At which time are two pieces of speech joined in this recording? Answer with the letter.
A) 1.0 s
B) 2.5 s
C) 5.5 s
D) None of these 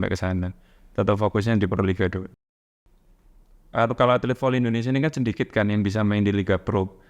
B